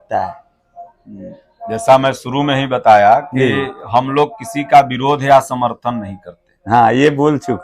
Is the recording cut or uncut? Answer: uncut